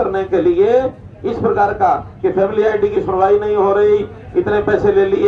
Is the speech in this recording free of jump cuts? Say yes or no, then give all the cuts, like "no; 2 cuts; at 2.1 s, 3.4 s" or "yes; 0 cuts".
yes; 0 cuts